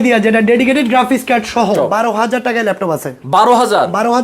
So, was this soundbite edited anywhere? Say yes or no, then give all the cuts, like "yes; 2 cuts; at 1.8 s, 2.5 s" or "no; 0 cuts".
yes; 1 cut; at 1.7 s